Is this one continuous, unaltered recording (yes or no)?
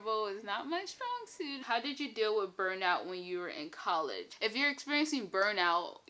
no